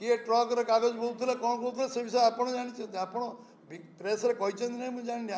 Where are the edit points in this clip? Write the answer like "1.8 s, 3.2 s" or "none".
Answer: none